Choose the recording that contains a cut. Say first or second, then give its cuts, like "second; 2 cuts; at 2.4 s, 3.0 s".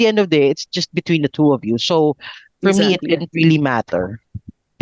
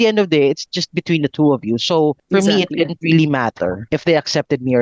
second; 2 cuts; at 2.2 s, 3.8 s